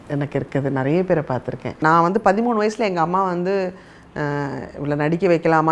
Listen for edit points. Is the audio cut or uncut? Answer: cut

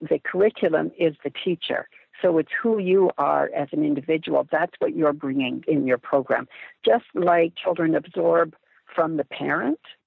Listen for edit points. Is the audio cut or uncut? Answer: cut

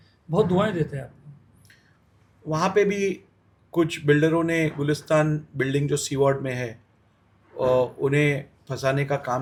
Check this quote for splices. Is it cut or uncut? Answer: uncut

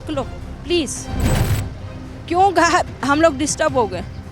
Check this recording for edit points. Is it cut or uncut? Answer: uncut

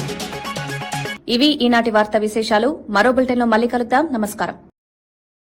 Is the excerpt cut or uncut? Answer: uncut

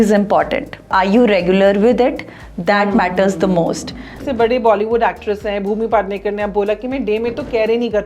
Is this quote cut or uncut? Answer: cut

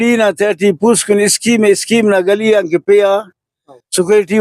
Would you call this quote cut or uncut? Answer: uncut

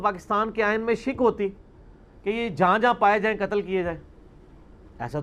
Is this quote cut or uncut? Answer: uncut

